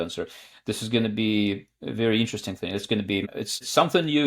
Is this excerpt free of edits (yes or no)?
no